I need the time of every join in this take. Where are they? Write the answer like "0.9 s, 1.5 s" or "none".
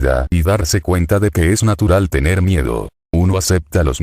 3.0 s